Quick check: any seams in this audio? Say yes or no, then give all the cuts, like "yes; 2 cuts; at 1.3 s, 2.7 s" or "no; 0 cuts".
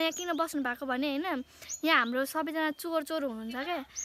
no; 0 cuts